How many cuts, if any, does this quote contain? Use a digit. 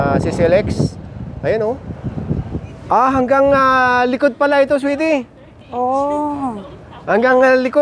1